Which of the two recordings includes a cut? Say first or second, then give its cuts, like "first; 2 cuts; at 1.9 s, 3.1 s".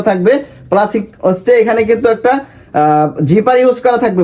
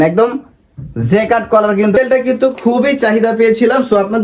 second; 1 cut; at 1.9 s